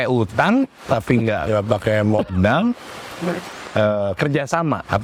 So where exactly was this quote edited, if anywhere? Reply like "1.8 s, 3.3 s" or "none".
none